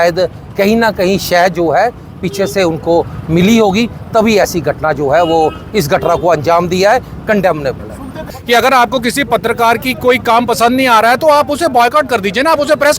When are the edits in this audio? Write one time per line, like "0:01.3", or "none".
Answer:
0:08.3